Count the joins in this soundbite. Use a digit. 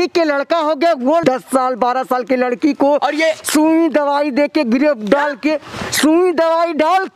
1